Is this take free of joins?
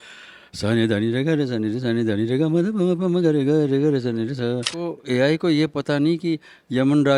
no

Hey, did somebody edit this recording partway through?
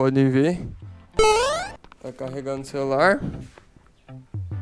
yes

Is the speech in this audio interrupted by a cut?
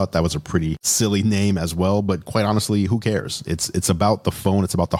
no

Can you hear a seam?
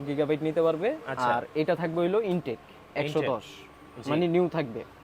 no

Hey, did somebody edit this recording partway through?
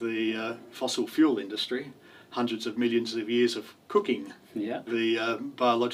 no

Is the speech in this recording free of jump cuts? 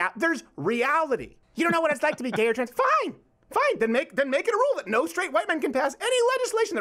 no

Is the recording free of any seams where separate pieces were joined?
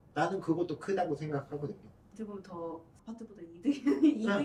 yes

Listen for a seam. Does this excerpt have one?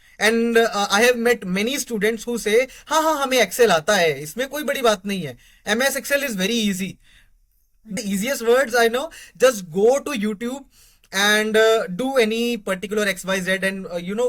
yes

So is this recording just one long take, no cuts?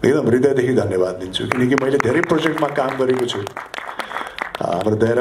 yes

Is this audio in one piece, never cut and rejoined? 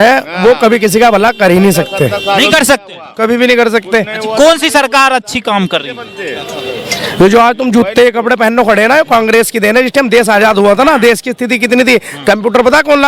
yes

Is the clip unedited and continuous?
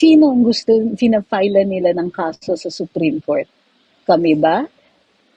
yes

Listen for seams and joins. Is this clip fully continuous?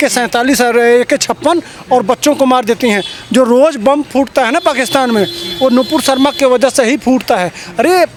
yes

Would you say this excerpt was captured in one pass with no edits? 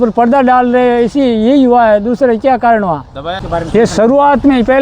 no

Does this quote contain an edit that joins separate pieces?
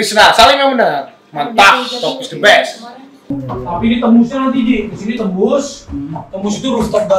yes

